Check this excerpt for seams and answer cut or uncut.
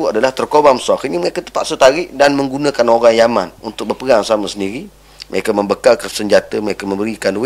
cut